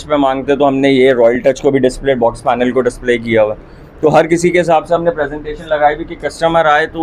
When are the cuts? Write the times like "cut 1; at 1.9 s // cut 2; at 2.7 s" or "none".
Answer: none